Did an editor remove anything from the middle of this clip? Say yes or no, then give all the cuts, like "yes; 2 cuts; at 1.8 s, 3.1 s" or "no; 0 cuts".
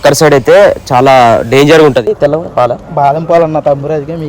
yes; 1 cut; at 2.0 s